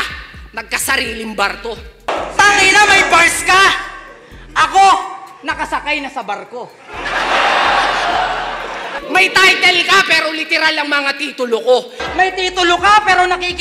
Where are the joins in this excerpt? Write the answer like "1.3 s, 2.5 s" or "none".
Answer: 2.1 s, 8.9 s, 12.0 s